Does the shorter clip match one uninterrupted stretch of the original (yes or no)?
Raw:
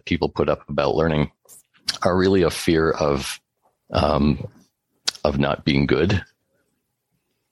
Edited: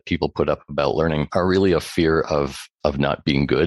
no